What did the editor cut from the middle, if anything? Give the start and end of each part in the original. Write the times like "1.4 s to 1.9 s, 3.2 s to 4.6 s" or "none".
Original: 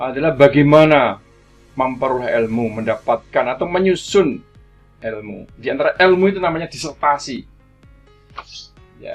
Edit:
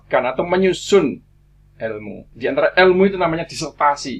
none